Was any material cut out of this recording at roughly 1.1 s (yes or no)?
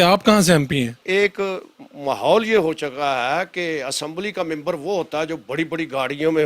no